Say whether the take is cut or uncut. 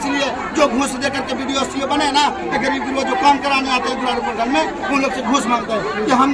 uncut